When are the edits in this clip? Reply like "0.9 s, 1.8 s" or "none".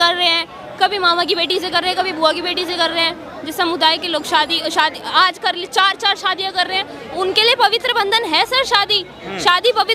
none